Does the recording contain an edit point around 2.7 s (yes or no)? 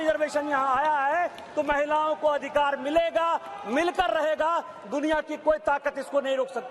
no